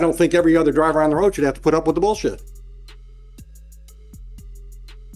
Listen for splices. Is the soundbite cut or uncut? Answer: uncut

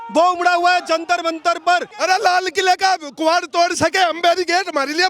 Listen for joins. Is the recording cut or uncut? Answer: cut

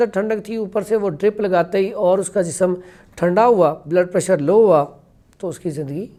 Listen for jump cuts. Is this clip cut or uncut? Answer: uncut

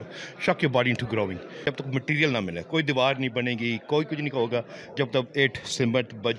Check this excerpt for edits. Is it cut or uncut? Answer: cut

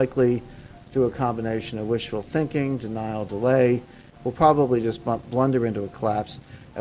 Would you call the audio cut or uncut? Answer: cut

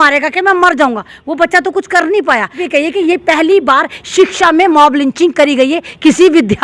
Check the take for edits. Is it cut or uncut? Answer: cut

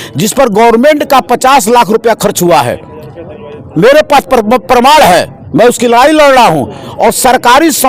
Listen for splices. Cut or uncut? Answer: uncut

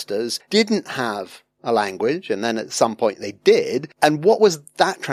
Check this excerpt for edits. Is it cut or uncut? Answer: uncut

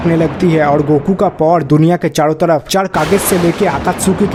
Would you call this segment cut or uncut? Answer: uncut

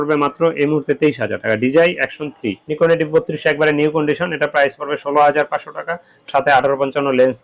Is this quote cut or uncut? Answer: cut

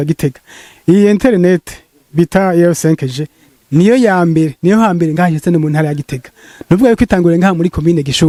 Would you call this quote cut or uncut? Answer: uncut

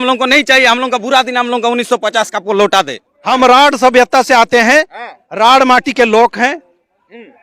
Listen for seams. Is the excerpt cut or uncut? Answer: cut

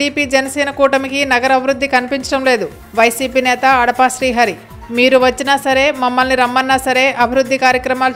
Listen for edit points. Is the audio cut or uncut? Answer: uncut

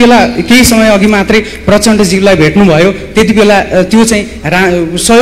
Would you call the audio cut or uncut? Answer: uncut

